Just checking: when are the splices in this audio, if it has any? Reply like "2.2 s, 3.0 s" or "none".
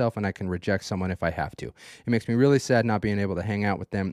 none